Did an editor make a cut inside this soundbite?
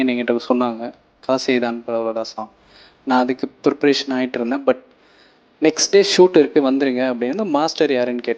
no; 0 cuts

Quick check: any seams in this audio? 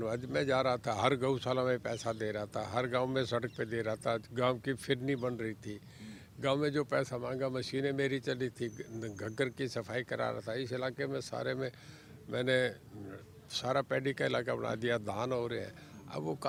no; 0 cuts

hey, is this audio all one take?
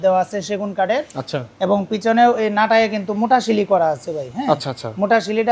yes; 0 cuts

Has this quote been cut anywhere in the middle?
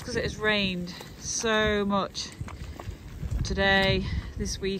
no; 0 cuts

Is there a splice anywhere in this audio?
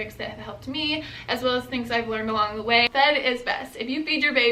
yes; 1 cut; at 2.9 s

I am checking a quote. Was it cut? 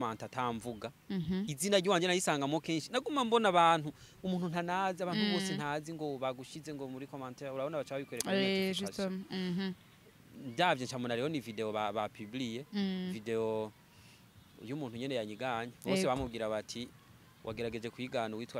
no; 0 cuts

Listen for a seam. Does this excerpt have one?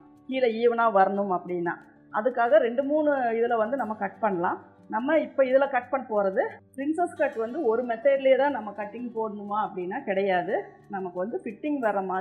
yes; 1 cut; at 6.6 s

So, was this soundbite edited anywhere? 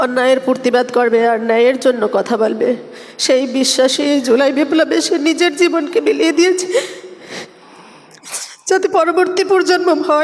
no; 0 cuts

